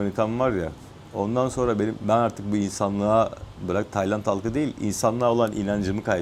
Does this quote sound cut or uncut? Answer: uncut